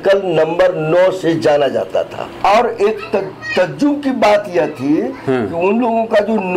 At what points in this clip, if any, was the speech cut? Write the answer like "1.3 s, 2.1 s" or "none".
2.2 s